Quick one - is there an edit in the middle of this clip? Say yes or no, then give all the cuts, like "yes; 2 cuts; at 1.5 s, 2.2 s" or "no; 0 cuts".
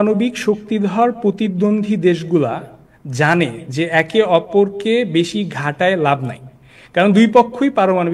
no; 0 cuts